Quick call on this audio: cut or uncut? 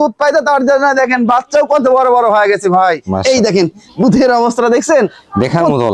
cut